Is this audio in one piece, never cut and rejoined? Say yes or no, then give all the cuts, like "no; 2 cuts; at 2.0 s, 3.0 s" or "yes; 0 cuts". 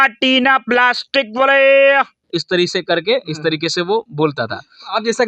yes; 0 cuts